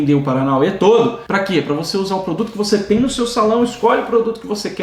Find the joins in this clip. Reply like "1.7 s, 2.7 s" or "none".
none